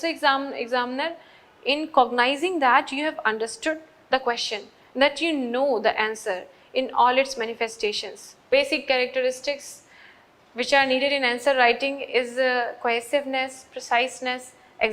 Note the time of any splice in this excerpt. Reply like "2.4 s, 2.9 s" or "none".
8.4 s